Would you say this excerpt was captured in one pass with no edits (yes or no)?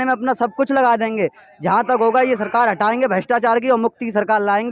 yes